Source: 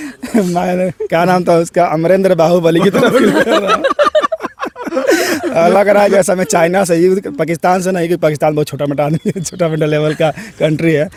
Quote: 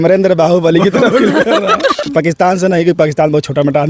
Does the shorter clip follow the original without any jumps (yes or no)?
no